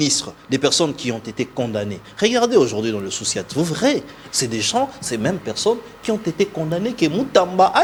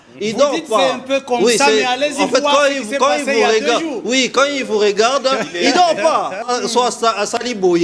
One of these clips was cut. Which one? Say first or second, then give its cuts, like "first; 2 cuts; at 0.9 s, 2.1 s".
second; 1 cut; at 6.4 s